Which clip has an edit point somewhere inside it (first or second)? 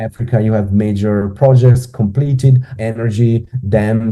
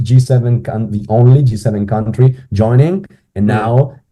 first